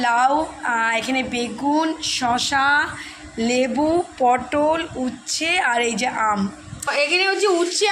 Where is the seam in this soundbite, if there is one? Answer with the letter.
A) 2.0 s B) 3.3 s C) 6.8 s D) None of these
C